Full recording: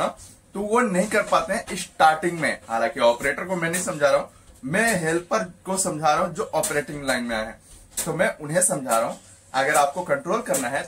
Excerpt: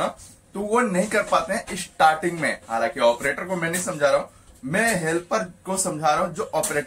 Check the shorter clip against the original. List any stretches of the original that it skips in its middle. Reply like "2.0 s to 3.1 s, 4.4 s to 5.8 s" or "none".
none